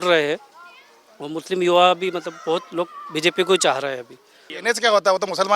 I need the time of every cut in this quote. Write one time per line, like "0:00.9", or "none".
0:04.5